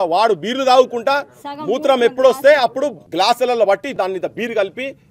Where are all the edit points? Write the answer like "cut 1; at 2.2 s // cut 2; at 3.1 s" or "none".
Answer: cut 1; at 3.0 s // cut 2; at 3.9 s

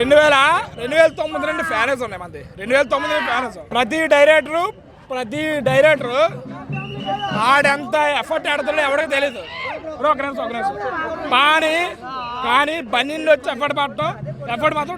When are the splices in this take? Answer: cut 1; at 3.6 s

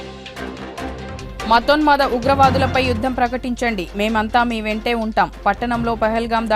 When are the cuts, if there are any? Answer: cut 1; at 0.9 s

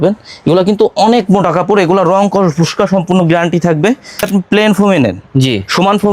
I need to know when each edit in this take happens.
cut 1; at 4.3 s

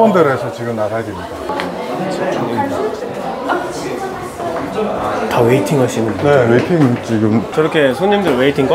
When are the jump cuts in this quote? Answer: cut 1; at 1.5 s

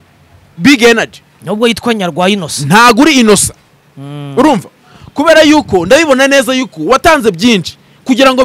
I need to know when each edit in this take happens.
none

